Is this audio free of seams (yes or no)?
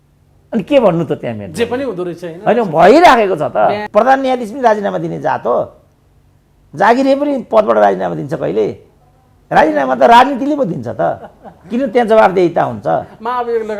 no